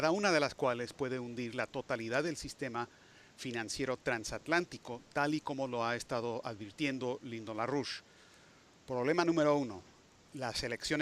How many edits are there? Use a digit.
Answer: 1